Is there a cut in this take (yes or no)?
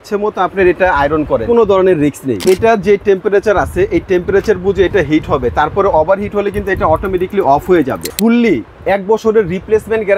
yes